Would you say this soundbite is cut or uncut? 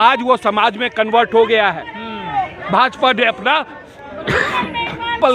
uncut